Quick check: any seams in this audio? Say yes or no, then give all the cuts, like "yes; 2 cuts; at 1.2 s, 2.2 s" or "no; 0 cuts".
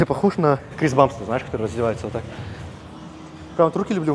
no; 0 cuts